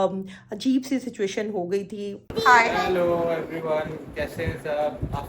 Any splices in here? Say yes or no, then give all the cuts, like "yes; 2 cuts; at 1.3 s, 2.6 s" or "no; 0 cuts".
yes; 1 cut; at 2.2 s